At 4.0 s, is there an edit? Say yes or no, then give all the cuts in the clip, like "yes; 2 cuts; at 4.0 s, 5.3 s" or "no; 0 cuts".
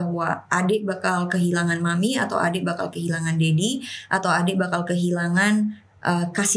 no; 0 cuts